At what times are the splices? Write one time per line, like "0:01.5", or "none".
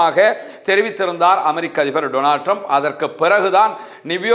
none

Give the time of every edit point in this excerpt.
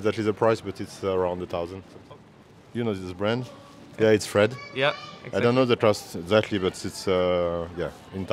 0:01.9
0:03.9

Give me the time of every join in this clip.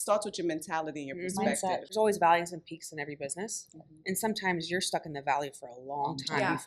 0:01.9

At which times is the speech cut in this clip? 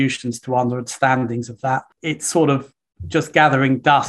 0:01.9

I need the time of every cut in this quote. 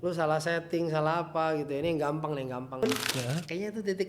0:02.8

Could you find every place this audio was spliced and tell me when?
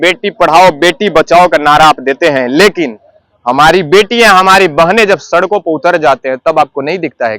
none

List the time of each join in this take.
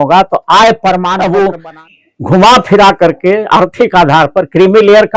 0:01.1

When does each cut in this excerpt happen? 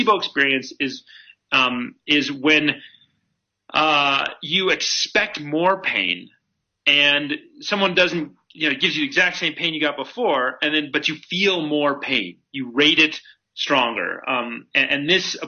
none

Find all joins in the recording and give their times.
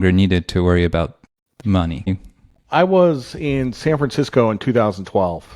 0:02.1

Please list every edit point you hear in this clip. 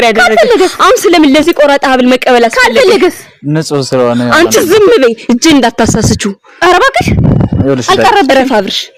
none

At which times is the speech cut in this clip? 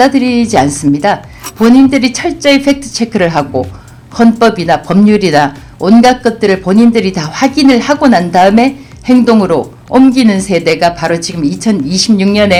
none

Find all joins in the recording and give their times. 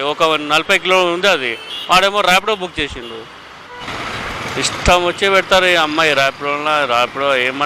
0:03.8

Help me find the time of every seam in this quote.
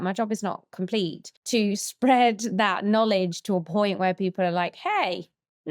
0:01.3

